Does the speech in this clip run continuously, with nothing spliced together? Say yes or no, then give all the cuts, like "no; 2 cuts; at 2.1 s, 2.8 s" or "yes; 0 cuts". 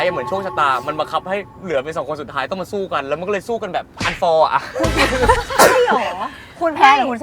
yes; 0 cuts